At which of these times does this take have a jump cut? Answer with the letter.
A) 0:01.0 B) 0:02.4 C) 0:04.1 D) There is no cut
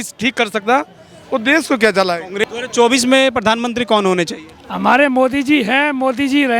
B